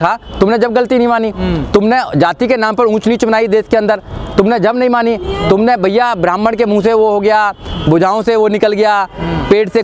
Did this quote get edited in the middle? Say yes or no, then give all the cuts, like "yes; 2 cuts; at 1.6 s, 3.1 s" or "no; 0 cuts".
no; 0 cuts